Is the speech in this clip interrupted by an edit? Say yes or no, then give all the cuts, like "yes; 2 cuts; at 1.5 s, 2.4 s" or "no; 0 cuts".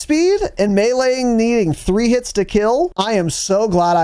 yes; 1 cut; at 3.0 s